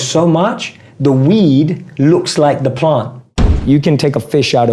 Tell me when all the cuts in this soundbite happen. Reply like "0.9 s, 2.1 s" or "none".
3.6 s